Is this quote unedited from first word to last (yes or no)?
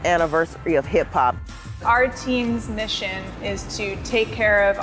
no